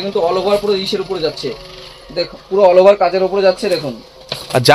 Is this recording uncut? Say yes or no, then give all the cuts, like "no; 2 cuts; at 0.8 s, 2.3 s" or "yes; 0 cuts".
yes; 0 cuts